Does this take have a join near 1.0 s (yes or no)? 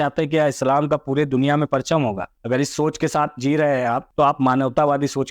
no